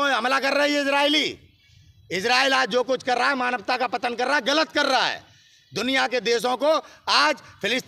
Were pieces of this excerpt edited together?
no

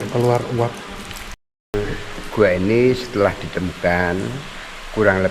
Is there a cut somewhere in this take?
yes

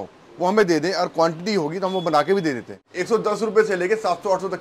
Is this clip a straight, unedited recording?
no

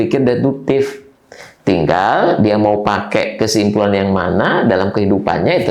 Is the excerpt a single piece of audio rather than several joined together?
yes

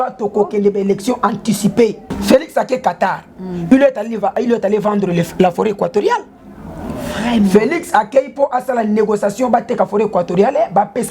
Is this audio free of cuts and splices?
no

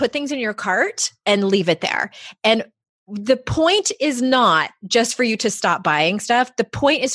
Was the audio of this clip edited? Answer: no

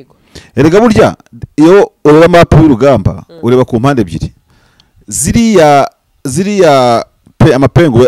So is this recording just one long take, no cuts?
yes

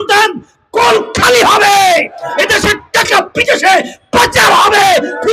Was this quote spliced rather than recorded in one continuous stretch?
no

